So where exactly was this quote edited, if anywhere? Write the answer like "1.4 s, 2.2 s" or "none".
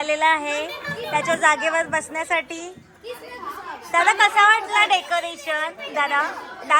none